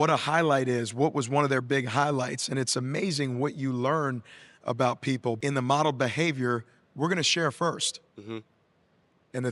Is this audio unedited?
no; 1 cut; at 5.4 s

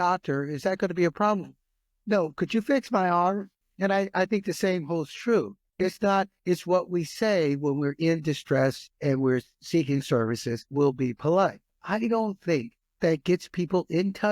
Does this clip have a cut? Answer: yes; 2 cuts; at 10.7 s, 11.7 s

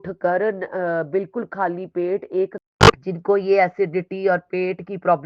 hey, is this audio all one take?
no; 1 cut; at 2.6 s

